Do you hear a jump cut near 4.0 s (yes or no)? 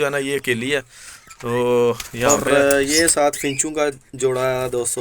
no